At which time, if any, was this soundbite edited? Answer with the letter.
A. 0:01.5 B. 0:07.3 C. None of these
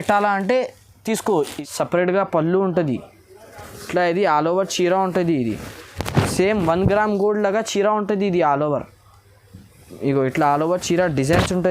A